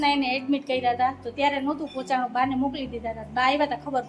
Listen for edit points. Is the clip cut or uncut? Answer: uncut